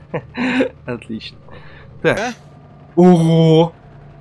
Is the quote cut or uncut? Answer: cut